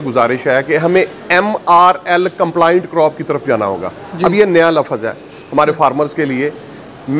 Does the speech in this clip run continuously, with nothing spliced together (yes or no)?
yes